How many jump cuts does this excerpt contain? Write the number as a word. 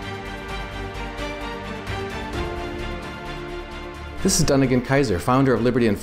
zero